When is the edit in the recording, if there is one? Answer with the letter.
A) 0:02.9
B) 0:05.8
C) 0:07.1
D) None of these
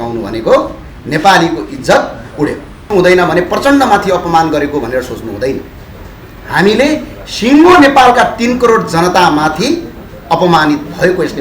A